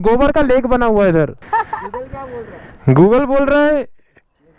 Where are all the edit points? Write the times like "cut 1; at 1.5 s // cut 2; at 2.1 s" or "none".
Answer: cut 1; at 1.4 s